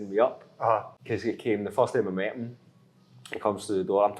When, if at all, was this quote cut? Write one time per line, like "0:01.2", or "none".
0:01.0

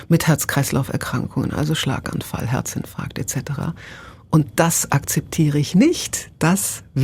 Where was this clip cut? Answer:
none

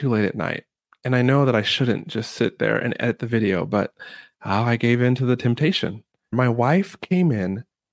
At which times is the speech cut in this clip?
0:06.3

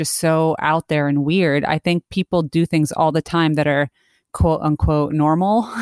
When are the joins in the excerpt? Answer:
none

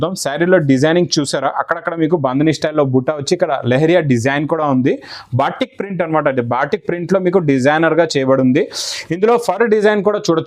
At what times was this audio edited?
none

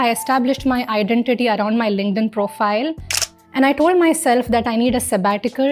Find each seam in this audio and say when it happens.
0:03.1

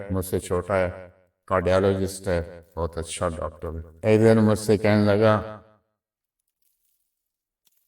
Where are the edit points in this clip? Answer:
0:03.9

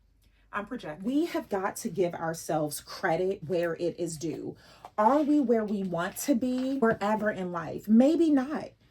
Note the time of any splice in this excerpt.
0:00.9
0:06.8

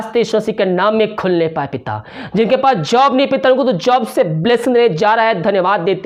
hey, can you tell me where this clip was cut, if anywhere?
none

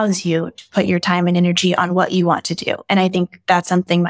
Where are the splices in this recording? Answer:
none

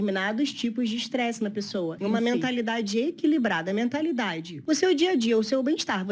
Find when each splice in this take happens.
0:02.0
0:04.6

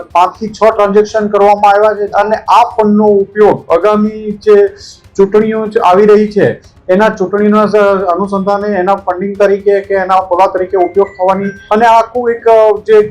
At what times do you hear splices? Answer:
0:02.1
0:11.5

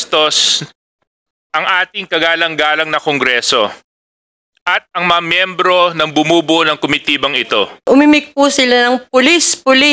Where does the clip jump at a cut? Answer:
0:07.8

